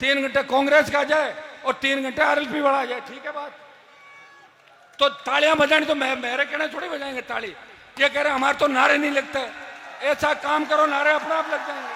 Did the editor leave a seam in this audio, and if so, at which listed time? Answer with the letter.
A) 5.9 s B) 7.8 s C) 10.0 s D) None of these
D